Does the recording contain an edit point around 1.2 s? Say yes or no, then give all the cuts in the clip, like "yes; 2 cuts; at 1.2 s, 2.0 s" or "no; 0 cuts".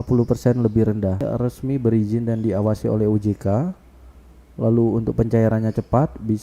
yes; 1 cut; at 1.2 s